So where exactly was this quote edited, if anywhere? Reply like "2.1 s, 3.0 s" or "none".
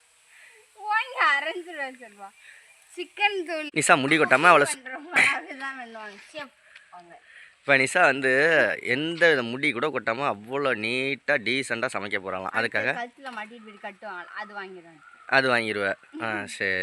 3.7 s

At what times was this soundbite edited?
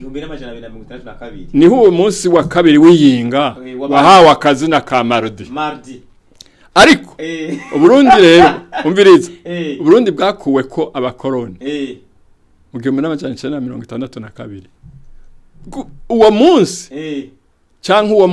none

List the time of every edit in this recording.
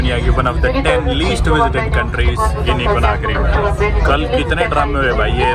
none

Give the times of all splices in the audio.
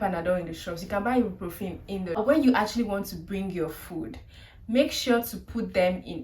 2.2 s

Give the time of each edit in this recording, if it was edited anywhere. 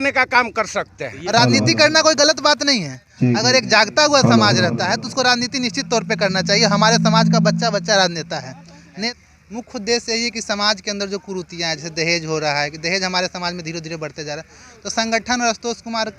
1.1 s, 9.1 s

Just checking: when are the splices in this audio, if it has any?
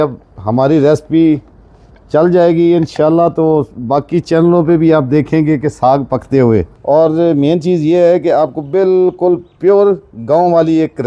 6.7 s

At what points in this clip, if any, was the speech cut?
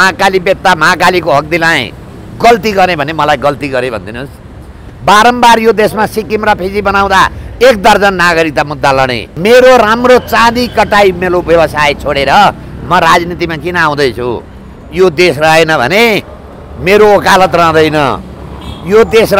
9.2 s

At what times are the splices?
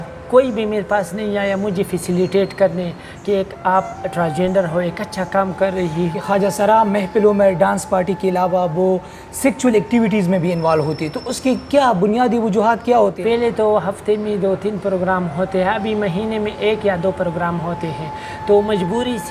6.2 s, 13.2 s

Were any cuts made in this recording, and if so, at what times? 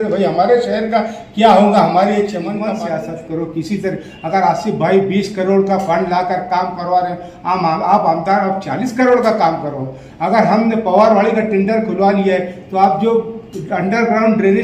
2.6 s

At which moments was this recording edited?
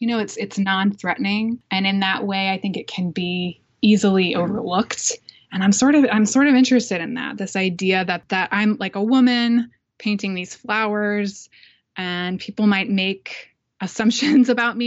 none

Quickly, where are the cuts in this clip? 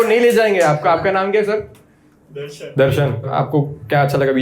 3.3 s

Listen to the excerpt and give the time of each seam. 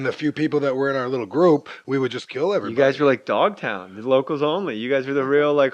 3.2 s

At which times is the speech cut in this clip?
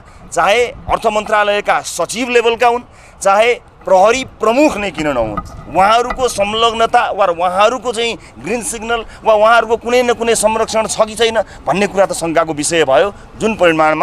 none

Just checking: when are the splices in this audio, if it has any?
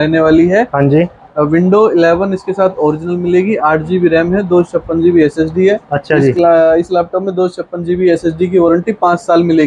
none

